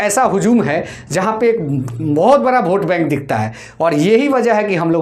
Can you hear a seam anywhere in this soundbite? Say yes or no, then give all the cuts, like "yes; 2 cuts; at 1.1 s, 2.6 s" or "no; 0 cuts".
no; 0 cuts